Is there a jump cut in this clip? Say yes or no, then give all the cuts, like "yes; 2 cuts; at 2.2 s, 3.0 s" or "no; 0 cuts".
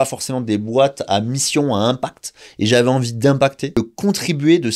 yes; 1 cut; at 3.7 s